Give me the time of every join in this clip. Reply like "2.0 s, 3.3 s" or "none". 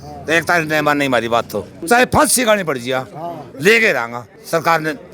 1.8 s